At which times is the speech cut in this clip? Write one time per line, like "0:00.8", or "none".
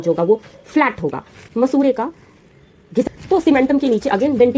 0:01.4
0:03.0